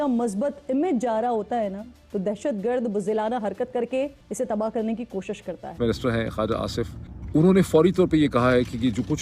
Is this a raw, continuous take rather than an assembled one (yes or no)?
no